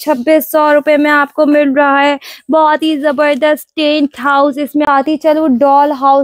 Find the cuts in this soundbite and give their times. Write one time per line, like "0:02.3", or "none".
0:04.9